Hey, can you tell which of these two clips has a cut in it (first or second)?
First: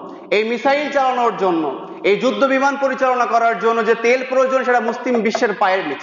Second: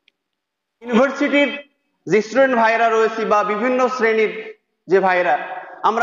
second